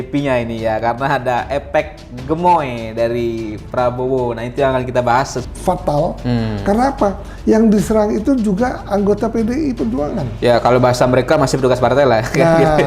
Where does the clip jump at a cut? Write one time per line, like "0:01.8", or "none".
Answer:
0:05.4